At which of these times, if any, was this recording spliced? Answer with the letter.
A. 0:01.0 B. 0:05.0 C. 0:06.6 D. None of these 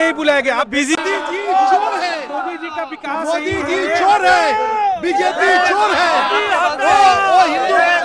A